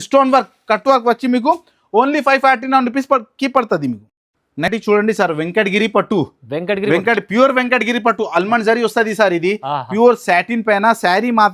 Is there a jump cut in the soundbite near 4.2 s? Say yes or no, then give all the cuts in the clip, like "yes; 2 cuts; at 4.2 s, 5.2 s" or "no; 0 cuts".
no; 0 cuts